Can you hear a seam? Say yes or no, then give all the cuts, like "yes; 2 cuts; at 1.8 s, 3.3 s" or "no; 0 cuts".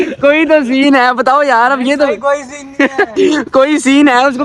no; 0 cuts